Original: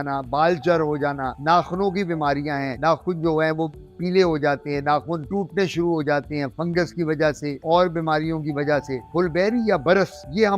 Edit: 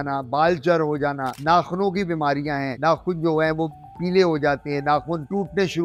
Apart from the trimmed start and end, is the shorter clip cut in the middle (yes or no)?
no